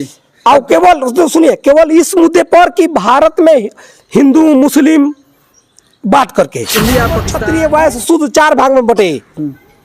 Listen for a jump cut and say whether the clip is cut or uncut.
cut